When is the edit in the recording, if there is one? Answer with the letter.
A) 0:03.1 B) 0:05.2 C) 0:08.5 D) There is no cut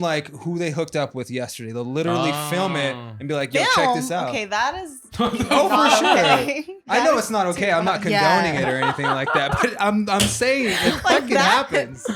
D